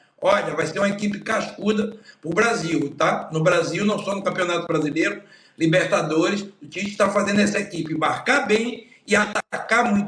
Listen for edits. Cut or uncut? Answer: uncut